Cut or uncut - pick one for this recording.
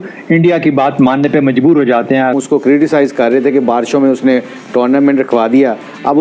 cut